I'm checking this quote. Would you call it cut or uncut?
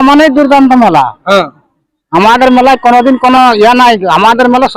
uncut